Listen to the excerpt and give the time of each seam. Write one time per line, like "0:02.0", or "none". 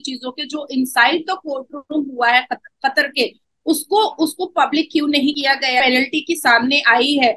none